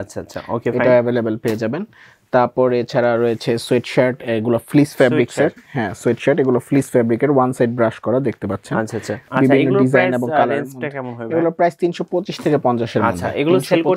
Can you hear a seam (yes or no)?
yes